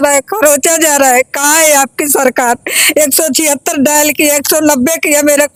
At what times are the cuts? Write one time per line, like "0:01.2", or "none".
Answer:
none